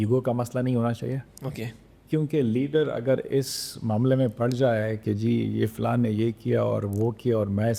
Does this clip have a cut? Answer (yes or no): no